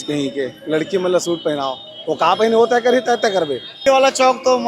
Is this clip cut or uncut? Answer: cut